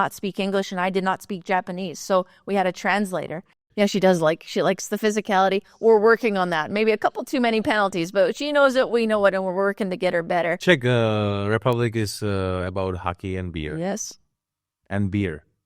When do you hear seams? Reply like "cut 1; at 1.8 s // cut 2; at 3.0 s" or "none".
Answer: cut 1; at 3.6 s // cut 2; at 10.6 s